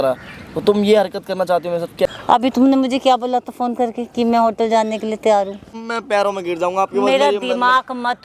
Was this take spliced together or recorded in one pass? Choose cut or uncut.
cut